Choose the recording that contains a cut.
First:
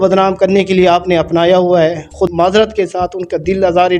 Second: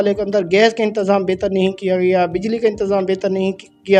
first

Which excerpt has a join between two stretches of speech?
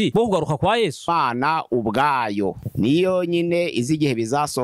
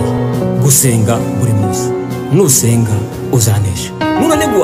first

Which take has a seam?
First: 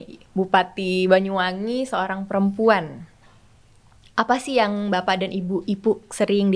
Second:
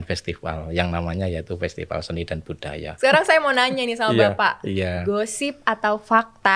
second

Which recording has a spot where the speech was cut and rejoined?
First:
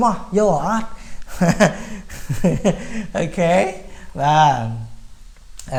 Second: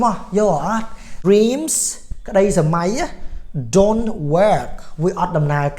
second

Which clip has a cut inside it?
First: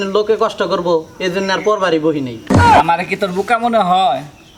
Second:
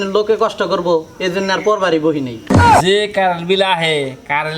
second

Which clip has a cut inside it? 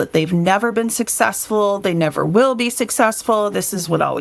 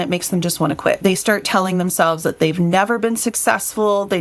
second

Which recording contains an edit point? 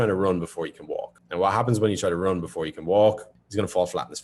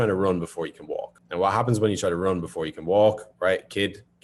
first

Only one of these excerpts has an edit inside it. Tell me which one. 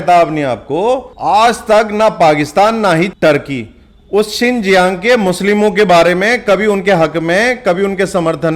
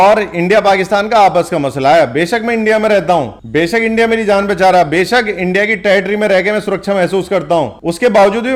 first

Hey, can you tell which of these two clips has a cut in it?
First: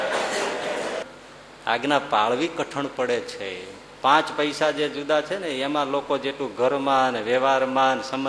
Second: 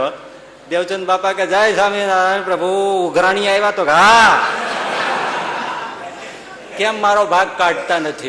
first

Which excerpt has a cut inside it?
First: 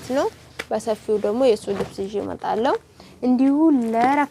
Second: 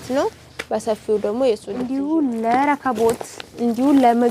second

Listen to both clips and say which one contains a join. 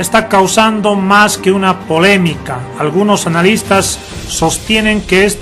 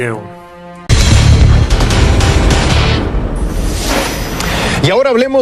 first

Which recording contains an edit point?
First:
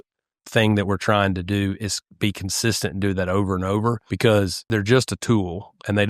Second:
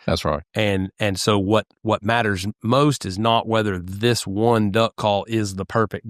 first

